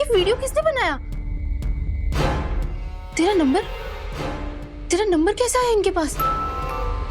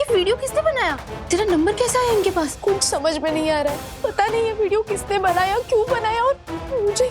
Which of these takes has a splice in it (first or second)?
second